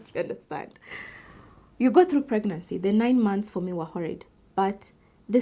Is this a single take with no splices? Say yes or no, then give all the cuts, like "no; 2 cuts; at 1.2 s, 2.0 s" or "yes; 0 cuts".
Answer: yes; 0 cuts